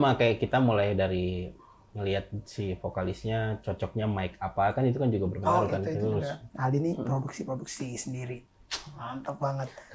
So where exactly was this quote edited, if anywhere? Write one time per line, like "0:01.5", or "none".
0:06.4

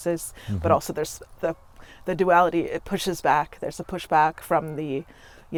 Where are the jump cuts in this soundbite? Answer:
none

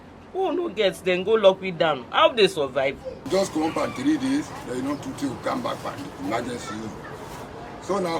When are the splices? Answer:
0:03.3

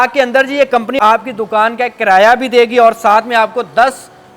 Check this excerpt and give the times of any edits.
0:01.0

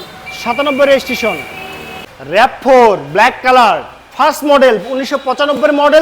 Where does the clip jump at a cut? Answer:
0:02.0

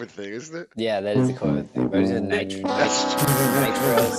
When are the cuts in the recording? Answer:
none

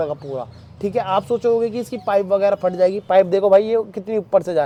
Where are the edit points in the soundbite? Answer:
none

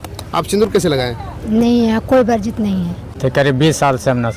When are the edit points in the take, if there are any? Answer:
0:03.2

